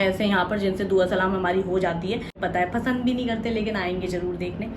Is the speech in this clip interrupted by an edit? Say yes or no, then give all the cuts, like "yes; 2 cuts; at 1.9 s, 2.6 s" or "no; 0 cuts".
yes; 1 cut; at 2.4 s